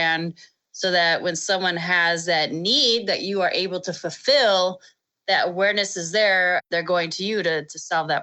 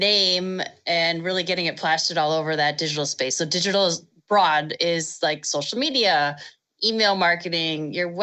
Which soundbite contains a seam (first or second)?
first